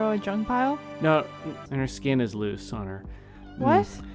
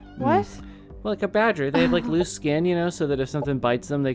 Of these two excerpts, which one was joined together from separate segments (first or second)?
first